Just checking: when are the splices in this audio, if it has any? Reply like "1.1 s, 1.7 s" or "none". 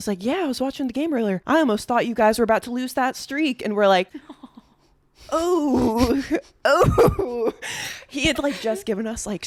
none

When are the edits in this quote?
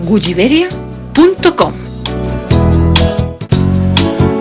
3.4 s

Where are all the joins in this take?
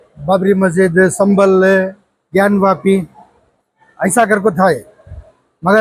none

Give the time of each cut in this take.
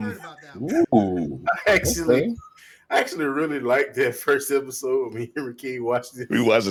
none

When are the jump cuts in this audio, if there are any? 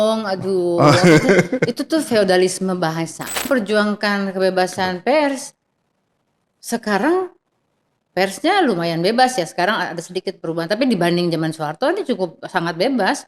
3.5 s

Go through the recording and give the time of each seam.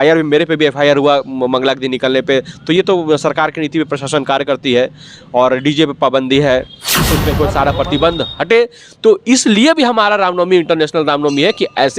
7.2 s

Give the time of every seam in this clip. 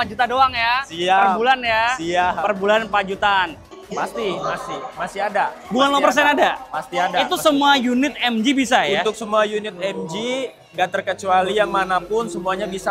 3.7 s

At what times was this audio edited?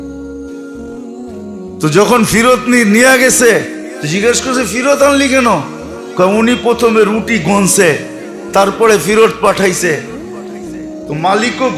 1.8 s

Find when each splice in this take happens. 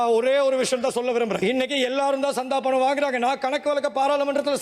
none

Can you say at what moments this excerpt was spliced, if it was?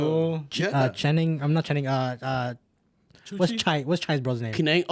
none

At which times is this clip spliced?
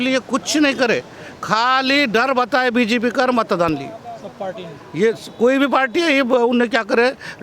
none

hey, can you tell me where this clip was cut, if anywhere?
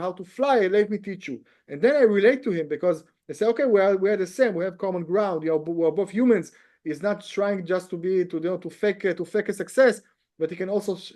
none

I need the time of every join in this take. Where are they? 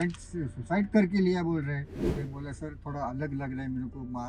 2.0 s

